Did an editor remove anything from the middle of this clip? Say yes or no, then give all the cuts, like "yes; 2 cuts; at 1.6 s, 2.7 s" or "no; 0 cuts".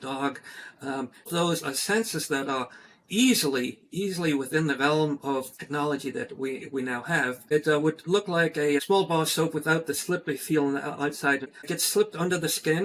yes; 5 cuts; at 1.3 s, 5.6 s, 7.4 s, 8.8 s, 11.8 s